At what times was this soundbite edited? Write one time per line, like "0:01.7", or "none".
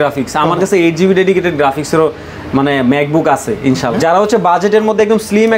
0:03.9